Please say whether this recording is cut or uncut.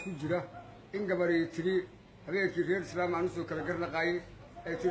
cut